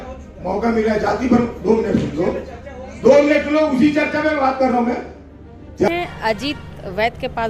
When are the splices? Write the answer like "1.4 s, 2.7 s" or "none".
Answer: 5.9 s